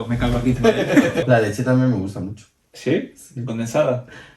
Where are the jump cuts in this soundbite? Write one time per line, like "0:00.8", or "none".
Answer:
0:01.2